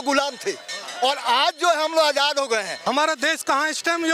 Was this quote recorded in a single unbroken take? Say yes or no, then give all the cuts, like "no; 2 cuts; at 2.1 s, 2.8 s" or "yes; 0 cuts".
no; 1 cut; at 2.7 s